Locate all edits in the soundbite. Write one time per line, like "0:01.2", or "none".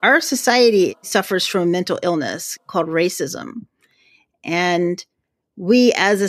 0:01.0